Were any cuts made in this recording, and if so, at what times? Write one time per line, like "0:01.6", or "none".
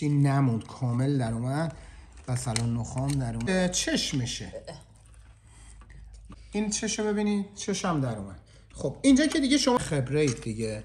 0:03.5
0:06.4
0:09.8